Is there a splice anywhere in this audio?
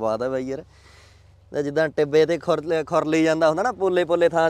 no; 0 cuts

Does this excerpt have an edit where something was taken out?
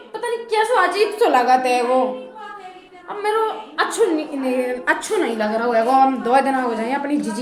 no; 0 cuts

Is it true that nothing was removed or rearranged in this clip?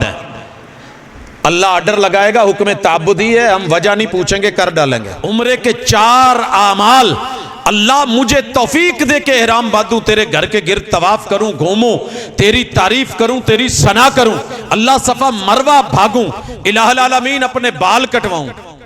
no; 1 cut; at 5.1 s

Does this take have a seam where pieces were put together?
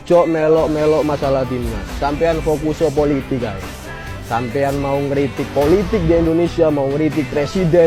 no; 0 cuts

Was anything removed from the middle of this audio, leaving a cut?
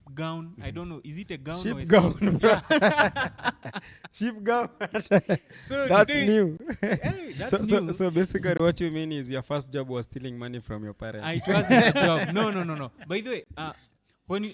no; 0 cuts

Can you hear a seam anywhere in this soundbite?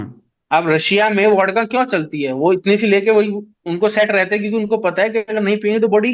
no; 0 cuts

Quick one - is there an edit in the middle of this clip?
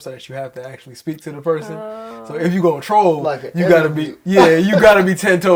no; 0 cuts

